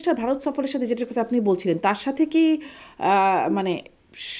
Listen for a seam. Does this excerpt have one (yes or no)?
no